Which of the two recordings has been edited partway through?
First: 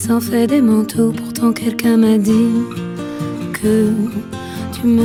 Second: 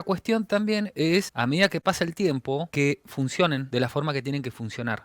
second; 3 cuts; at 1.3 s, 2.7 s, 3.7 s

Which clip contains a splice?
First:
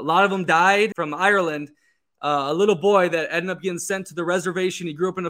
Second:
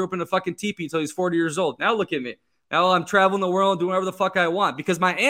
first; 1 cut; at 0.9 s

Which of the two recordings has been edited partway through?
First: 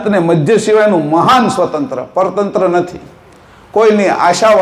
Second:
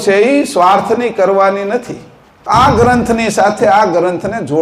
second; 1 cut; at 2.4 s

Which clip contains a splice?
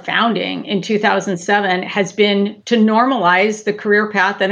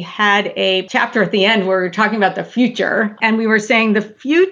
second; 1 cut; at 3.1 s

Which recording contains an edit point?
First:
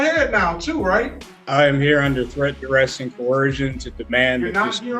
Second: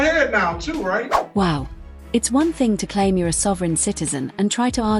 first; 1 cut; at 1.1 s

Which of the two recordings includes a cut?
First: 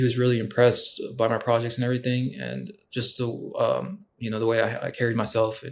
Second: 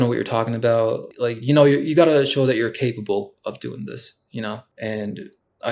second; 2 cuts; at 1.1 s, 4.7 s

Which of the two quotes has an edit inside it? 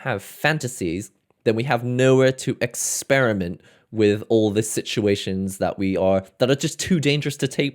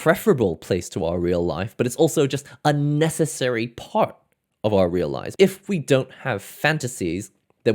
second; 1 cut; at 5.2 s

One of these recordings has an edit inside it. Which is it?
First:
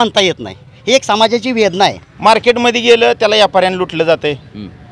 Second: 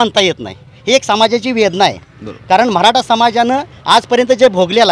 first; 1 cut; at 2.1 s

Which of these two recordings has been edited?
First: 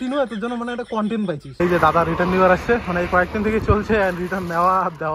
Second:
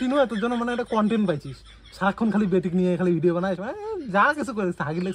first; 1 cut; at 1.5 s

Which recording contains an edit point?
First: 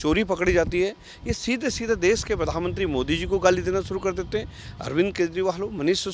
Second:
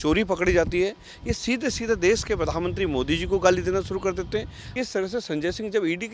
second; 1 cut; at 4.6 s

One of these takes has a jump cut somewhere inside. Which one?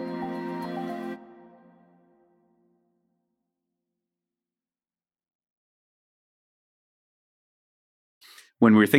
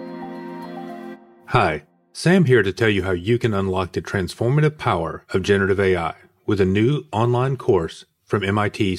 second; 1 cut; at 1.3 s

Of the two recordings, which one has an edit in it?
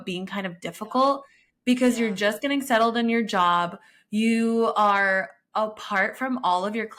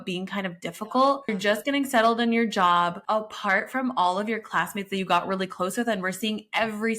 second; 2 cuts; at 1.4 s, 3.0 s

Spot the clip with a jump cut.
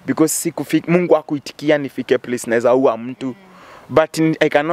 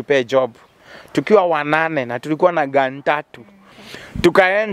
second; 1 cut; at 3.8 s

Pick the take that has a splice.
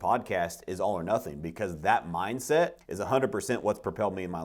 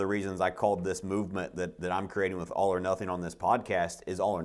first; 1 cut; at 2.9 s

